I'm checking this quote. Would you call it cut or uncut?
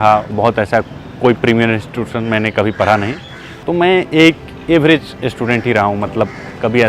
cut